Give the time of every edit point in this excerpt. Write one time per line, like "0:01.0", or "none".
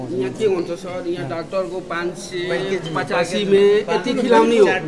none

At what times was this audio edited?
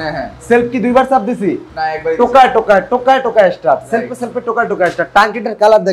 none

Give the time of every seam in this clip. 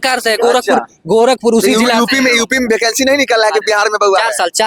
none

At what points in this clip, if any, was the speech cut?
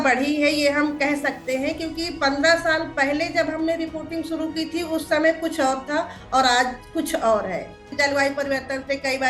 0:07.9

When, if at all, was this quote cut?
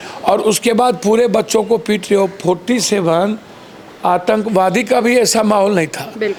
none

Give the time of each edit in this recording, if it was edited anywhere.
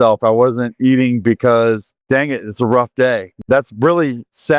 0:01.9
0:03.3

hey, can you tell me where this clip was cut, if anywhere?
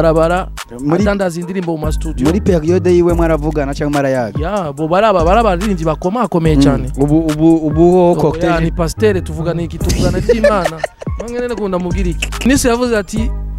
0:12.4

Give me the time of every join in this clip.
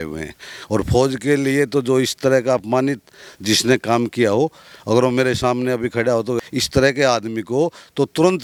none

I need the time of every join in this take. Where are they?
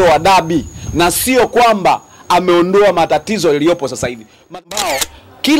0:04.5

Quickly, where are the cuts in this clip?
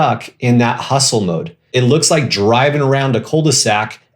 0:01.7

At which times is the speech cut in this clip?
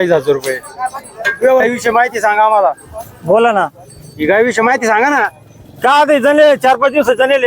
0:01.6

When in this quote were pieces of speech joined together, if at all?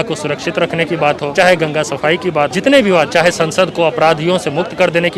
0:01.3
0:02.5

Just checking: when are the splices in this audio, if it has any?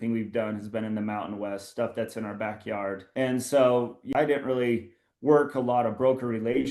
0:03.0
0:04.1

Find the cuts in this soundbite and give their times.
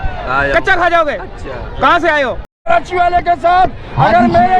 0:02.5

